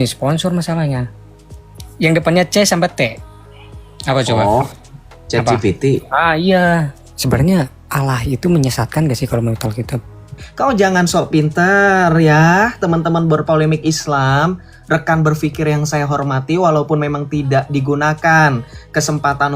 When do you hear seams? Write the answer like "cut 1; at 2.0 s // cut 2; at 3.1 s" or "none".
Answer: cut 1; at 7.0 s // cut 2; at 10.4 s